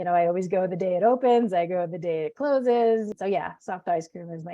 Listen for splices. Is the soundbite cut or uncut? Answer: cut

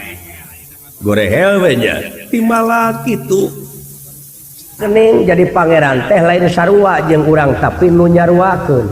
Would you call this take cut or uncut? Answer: cut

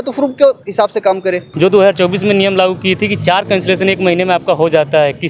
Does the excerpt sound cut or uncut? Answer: cut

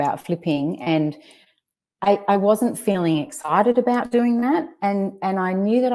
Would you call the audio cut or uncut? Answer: uncut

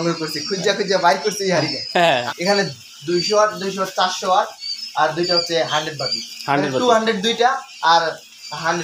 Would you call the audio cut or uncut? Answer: cut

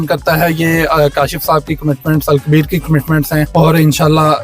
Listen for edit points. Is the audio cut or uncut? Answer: cut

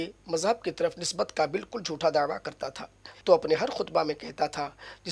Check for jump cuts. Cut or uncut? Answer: cut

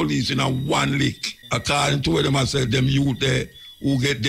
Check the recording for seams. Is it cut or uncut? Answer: cut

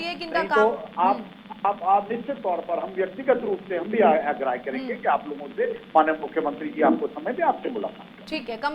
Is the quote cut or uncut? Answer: uncut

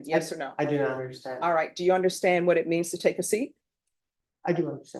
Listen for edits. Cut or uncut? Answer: uncut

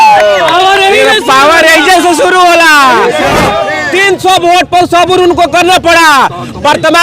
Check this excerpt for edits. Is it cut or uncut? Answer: cut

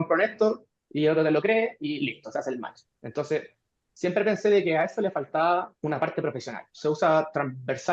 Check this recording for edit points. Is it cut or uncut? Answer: cut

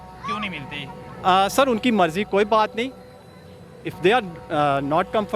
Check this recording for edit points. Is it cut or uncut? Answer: uncut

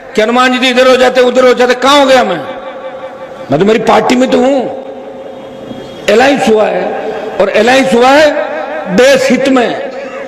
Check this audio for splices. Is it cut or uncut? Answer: uncut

